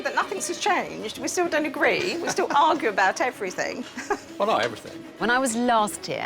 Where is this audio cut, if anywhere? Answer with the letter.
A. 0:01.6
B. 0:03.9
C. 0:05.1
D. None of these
C